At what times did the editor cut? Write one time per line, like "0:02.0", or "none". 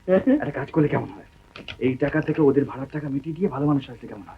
none